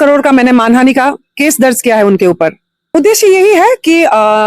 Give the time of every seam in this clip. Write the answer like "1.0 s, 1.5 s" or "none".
2.9 s